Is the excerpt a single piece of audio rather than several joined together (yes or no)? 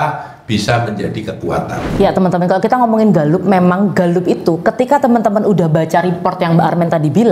no